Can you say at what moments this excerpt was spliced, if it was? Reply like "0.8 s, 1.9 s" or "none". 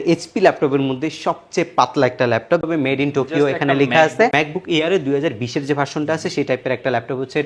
2.7 s, 4.3 s